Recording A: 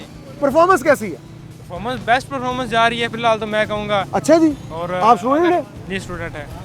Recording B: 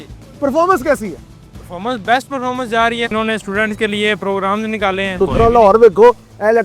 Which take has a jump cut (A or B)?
B